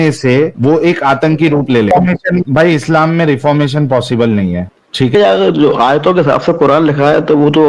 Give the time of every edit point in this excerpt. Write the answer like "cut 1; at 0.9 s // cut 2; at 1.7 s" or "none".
cut 1; at 1.9 s // cut 2; at 5.1 s